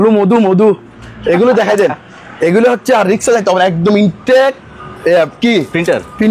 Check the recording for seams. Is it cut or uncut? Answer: uncut